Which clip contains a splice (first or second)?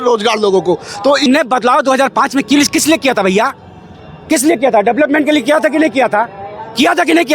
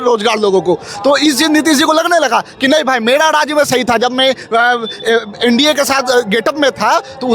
first